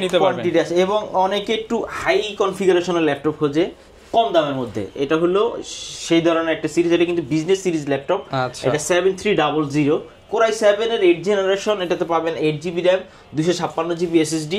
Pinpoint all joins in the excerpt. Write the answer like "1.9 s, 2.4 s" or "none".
none

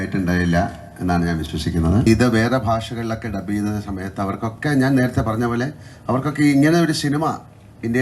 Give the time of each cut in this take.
2.1 s

